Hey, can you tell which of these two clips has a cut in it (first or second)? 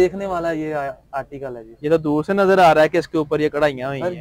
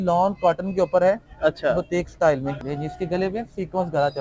second